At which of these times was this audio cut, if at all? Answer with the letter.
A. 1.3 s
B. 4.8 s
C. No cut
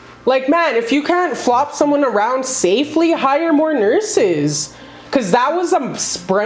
C